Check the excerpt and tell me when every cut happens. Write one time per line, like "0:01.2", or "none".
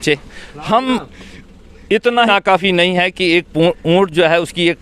0:02.3